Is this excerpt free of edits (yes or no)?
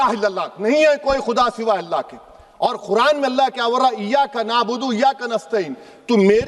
yes